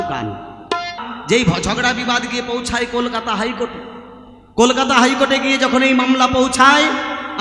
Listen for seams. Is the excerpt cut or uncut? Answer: cut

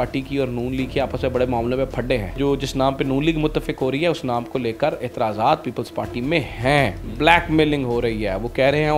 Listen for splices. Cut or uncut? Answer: cut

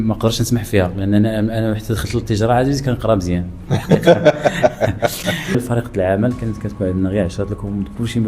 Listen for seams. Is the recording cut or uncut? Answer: cut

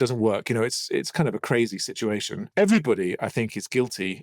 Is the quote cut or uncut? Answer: cut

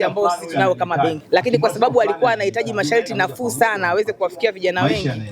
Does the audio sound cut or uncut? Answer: cut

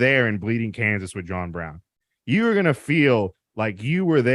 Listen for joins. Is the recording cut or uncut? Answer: uncut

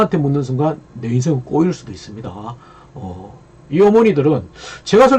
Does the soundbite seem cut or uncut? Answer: uncut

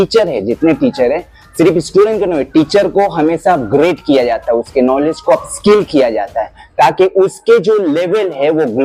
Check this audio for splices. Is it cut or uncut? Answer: uncut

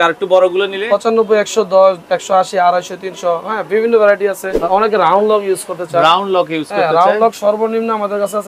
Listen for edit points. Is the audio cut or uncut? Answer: cut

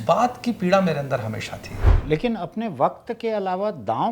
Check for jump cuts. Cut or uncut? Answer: cut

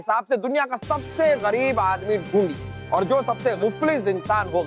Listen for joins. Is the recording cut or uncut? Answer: cut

